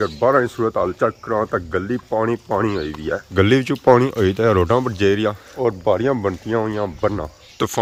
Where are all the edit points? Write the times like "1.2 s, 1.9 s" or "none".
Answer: none